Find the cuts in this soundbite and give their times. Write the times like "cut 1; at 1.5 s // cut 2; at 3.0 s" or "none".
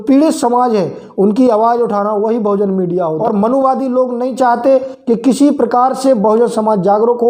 cut 1; at 3.2 s